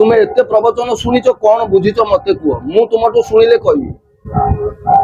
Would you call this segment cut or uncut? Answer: uncut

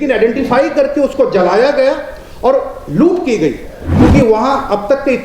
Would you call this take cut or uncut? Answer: cut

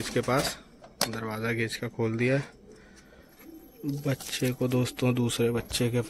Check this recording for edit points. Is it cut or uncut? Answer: uncut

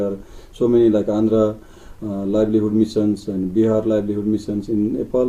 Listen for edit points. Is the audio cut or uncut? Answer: uncut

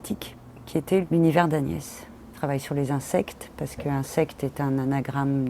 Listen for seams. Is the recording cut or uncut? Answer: cut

